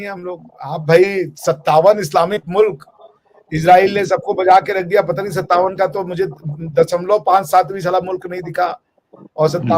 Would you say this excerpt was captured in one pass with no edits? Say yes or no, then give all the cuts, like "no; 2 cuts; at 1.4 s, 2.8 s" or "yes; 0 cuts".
yes; 0 cuts